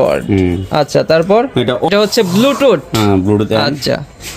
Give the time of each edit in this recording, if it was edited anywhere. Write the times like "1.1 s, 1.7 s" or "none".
1.9 s